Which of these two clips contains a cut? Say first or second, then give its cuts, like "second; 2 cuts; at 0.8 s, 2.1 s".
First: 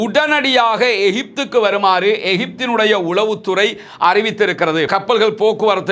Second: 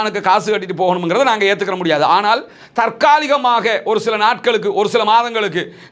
first; 1 cut; at 4.9 s